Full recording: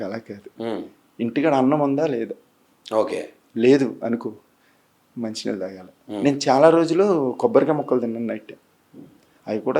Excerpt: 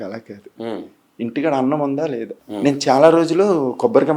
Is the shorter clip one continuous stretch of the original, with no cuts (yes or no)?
no